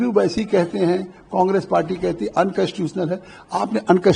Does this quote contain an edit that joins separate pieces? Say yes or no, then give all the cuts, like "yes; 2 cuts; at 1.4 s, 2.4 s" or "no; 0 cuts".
no; 0 cuts